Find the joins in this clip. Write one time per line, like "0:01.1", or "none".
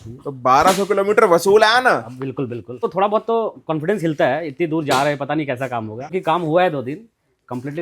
0:02.9
0:06.1